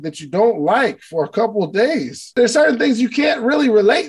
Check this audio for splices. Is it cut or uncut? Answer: cut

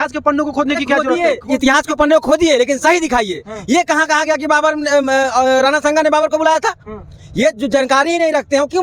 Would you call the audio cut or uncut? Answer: uncut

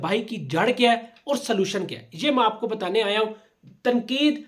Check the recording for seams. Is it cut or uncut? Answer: uncut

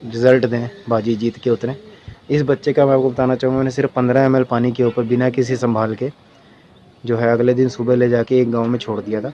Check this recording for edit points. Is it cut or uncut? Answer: uncut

